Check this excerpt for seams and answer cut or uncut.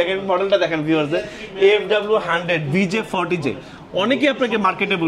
uncut